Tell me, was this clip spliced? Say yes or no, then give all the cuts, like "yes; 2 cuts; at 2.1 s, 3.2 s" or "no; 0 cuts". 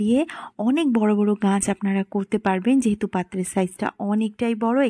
no; 0 cuts